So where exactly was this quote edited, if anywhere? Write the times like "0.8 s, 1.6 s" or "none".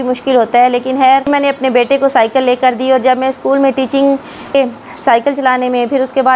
1.3 s, 4.5 s

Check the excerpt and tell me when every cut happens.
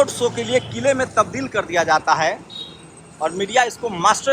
none

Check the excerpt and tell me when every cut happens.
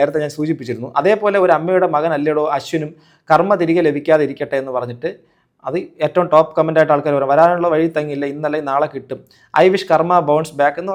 none

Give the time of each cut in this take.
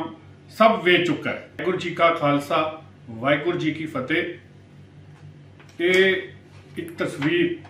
1.5 s

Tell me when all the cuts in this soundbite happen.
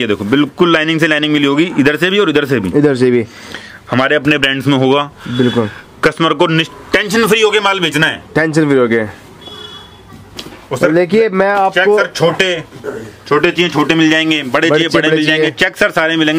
none

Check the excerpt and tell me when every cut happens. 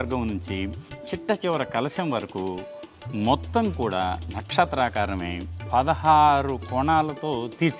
none

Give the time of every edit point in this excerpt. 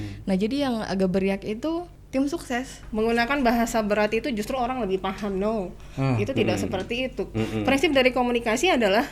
2.0 s, 2.8 s

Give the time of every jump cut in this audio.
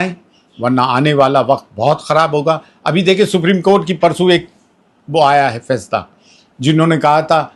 none

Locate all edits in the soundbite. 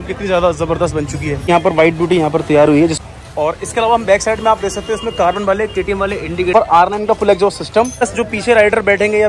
1.4 s, 3.0 s, 6.5 s, 8.1 s

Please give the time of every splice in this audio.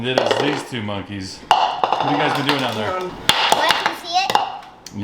3.1 s

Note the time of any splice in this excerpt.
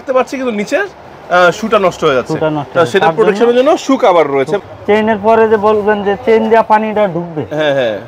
4.5 s

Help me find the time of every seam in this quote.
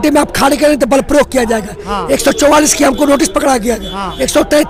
none

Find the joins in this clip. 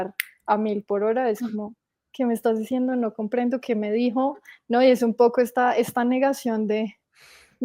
none

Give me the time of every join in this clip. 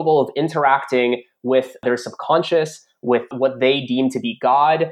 1.8 s, 3.3 s

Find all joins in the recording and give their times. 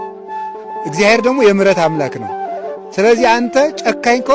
none

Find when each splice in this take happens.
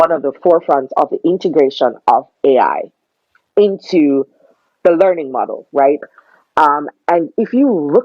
6.0 s

